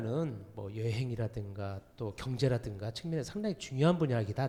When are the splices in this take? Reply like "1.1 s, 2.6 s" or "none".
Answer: none

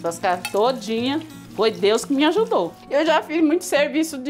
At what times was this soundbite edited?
2.8 s

